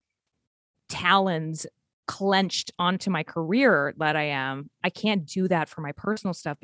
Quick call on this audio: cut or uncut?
uncut